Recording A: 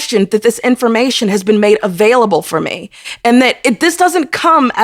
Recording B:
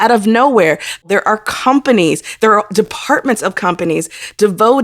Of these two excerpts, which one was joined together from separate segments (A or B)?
B